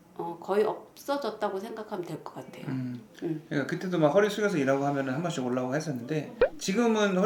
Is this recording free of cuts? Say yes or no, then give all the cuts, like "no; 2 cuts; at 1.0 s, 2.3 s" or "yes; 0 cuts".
yes; 0 cuts